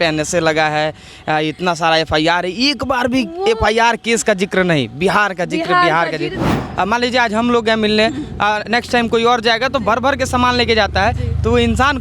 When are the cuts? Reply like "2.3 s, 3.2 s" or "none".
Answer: 6.5 s